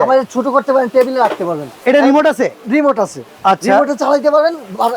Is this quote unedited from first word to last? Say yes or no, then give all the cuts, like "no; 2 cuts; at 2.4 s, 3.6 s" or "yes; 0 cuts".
no; 2 cuts; at 1.7 s, 3.2 s